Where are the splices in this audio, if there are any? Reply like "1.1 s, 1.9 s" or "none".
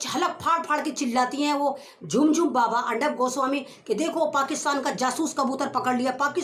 none